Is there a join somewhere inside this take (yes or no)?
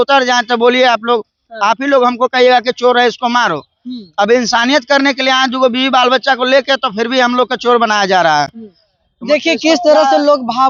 no